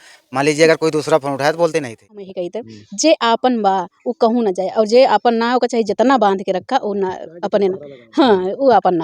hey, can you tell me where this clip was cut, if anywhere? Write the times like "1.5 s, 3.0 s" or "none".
2.3 s